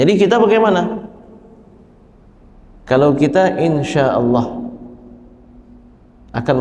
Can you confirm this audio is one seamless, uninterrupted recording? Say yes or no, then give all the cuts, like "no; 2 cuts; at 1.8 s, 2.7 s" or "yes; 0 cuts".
yes; 0 cuts